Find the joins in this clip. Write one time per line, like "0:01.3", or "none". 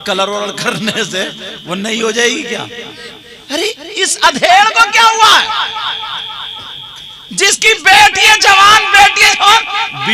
none

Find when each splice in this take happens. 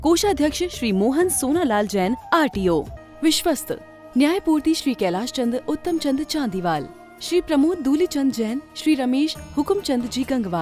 0:03.0

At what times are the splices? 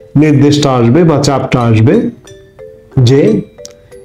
none

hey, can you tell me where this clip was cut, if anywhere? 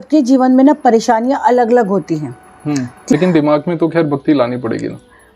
0:03.1

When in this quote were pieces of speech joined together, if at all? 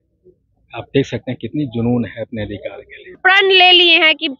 0:03.2

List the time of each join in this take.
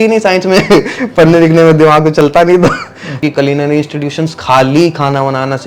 0:03.1

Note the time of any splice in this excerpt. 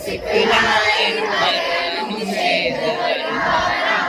none

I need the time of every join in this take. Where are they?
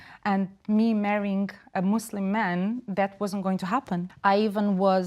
0:04.1

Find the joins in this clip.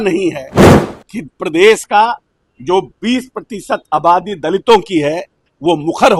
none

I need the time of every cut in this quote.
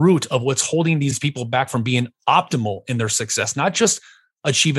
0:01.2

